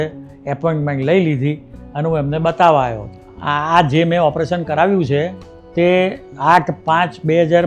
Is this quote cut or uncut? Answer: cut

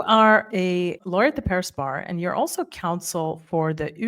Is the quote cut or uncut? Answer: cut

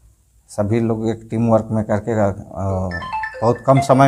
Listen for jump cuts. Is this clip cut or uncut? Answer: uncut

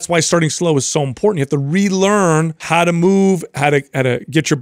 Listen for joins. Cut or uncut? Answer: cut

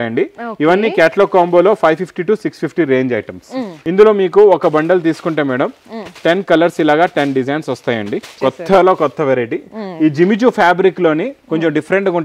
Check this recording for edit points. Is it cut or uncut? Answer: cut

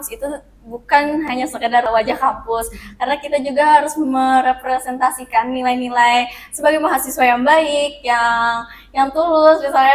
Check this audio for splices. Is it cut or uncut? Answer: cut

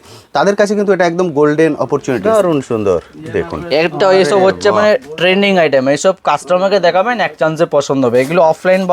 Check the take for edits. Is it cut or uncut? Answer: cut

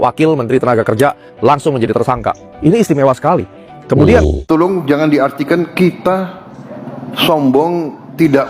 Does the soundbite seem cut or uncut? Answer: cut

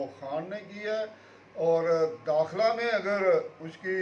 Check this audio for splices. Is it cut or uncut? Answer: uncut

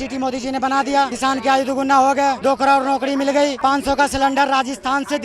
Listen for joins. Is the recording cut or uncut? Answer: cut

